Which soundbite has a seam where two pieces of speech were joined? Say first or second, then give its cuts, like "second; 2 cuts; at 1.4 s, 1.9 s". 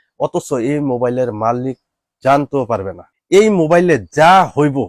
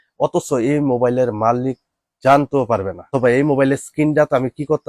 first; 1 cut; at 3.0 s